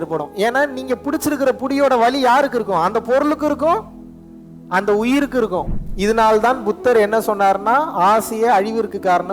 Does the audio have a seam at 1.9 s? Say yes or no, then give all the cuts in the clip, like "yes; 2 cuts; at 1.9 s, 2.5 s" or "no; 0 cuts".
no; 1 cut; at 5.7 s